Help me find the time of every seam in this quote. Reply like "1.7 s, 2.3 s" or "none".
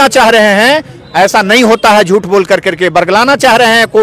none